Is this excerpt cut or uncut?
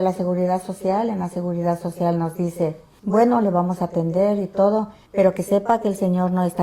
cut